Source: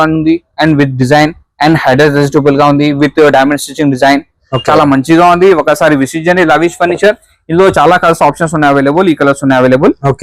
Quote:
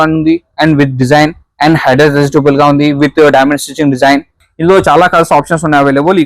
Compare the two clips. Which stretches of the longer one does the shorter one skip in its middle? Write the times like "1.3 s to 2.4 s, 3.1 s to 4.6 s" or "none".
4.4 s to 7.3 s